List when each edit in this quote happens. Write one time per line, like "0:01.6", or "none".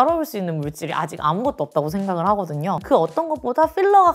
none